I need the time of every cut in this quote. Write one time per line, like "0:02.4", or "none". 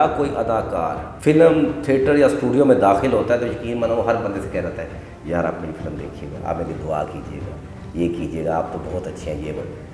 0:01.1